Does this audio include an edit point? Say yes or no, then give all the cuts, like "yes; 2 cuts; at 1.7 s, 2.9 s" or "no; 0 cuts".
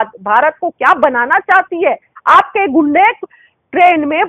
yes; 1 cut; at 2.1 s